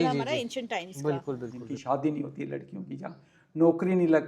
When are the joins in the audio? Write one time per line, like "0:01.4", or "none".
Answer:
0:01.5